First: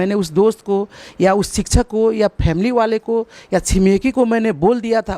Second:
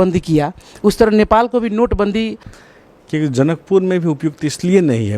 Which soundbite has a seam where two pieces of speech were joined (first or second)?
second